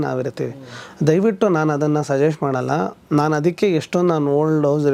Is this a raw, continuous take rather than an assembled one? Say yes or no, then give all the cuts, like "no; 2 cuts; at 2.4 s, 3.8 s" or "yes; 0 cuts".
yes; 0 cuts